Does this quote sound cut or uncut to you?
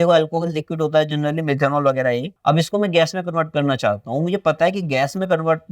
cut